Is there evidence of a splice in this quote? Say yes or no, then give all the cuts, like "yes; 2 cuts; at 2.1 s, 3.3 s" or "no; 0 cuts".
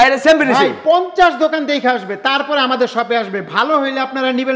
no; 0 cuts